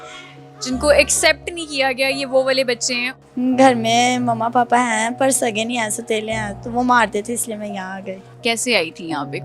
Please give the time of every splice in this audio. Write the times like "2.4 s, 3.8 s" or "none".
3.0 s, 8.3 s